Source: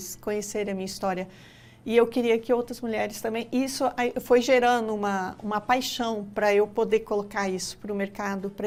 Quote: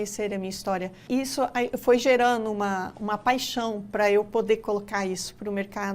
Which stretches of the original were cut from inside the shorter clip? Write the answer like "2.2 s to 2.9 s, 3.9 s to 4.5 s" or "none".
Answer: 1.4 s to 3.4 s